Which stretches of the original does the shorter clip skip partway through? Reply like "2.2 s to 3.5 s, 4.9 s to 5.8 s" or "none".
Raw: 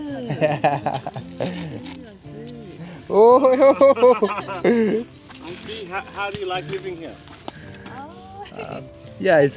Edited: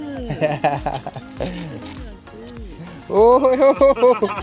none